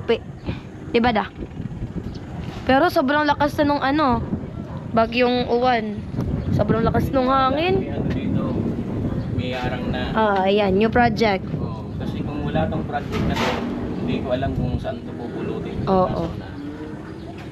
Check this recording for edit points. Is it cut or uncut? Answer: uncut